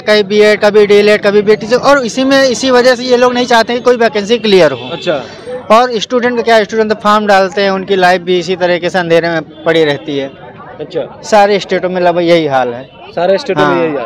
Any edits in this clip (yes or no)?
no